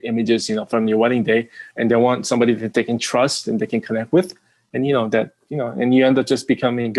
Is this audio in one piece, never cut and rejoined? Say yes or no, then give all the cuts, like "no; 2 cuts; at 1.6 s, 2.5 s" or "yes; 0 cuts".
yes; 0 cuts